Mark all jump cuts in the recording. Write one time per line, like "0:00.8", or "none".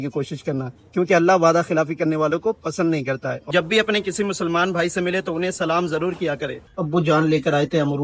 0:03.5
0:06.6

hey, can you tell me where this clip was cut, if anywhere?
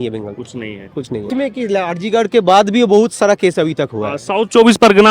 0:01.3

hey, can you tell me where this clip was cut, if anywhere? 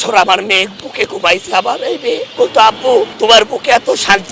0:02.3

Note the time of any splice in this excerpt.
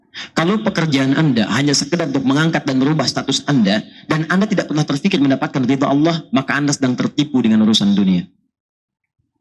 none

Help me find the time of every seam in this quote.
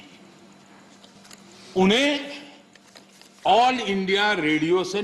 0:01.2

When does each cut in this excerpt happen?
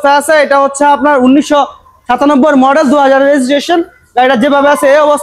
none

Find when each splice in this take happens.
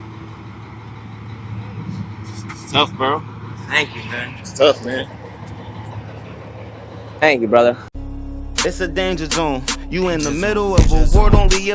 0:07.9

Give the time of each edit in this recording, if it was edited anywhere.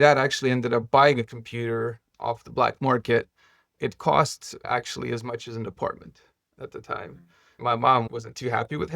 0:07.6

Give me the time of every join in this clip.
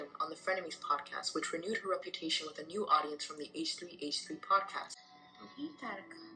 0:05.0

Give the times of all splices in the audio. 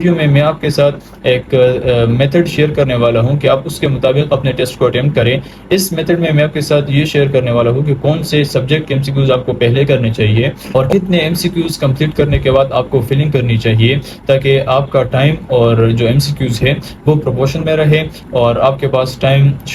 none

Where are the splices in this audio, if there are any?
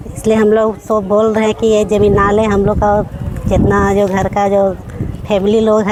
none

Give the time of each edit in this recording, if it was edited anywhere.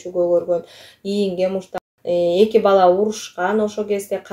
0:01.8

